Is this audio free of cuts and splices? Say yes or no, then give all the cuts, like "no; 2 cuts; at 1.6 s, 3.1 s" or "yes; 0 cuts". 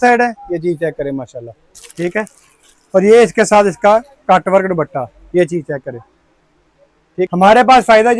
no; 1 cut; at 7.3 s